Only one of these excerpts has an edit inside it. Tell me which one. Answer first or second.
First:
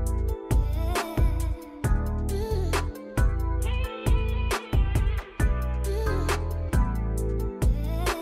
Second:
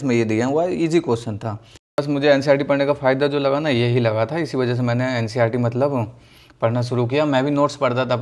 second